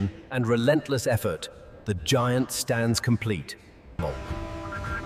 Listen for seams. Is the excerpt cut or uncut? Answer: uncut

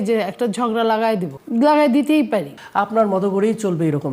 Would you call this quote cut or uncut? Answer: cut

